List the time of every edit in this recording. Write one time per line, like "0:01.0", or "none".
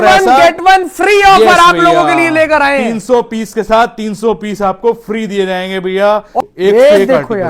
0:06.4